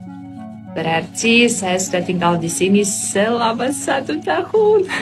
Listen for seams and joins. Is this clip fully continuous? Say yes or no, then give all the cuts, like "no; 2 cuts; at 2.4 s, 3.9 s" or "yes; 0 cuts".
yes; 0 cuts